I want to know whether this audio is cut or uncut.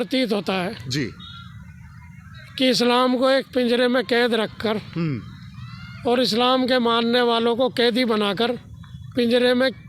uncut